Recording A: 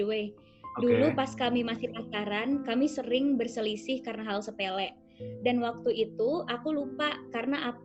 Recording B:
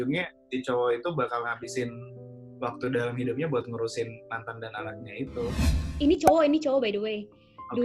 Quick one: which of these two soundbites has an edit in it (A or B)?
B